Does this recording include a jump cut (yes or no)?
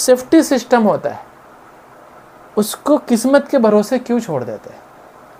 no